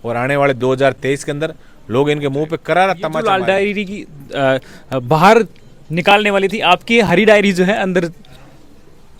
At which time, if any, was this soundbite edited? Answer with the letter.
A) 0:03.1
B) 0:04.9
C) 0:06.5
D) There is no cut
A